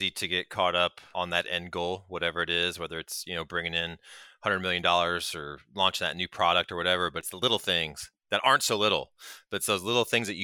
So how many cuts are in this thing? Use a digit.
2